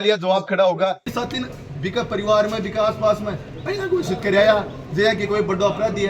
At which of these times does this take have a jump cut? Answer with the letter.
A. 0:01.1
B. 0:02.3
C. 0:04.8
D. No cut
A